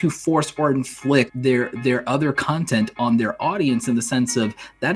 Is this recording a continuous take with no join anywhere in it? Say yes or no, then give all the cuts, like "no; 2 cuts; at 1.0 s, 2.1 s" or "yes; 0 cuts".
no; 1 cut; at 1.3 s